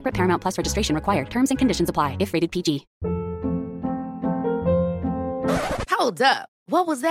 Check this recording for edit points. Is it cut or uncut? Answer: cut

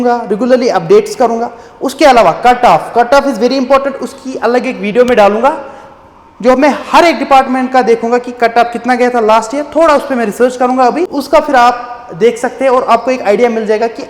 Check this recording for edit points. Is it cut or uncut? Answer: cut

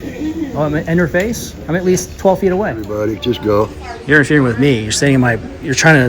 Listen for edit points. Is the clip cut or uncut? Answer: cut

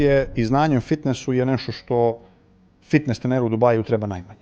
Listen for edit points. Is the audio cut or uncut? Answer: uncut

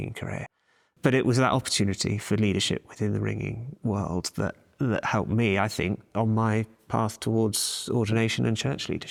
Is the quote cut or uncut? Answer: uncut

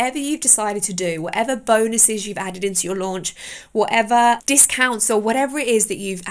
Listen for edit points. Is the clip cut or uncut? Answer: cut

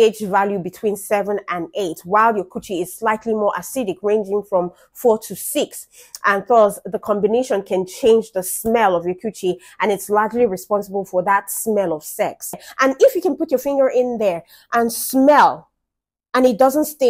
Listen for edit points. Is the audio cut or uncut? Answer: cut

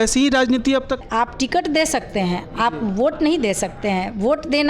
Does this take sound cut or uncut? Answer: cut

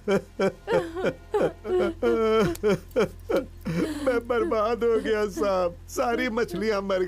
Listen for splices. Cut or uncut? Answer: cut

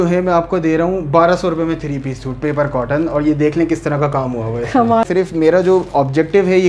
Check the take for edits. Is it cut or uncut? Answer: cut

